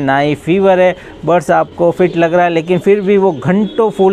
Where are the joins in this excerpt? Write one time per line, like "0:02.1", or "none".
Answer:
none